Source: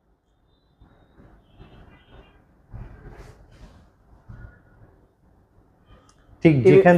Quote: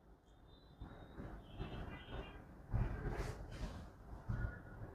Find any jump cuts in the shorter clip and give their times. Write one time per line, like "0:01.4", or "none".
none